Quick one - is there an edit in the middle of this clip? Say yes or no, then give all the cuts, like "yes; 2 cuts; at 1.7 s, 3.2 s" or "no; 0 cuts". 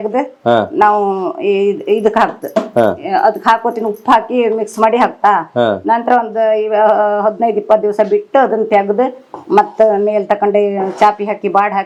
no; 0 cuts